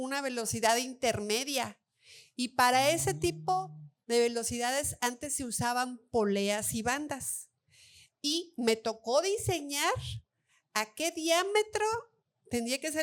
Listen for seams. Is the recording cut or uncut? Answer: uncut